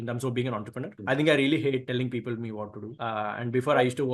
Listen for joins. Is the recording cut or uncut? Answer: cut